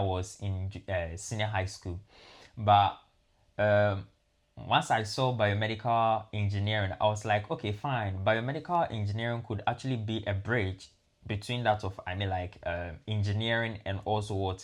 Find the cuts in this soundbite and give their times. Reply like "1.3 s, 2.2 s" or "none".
none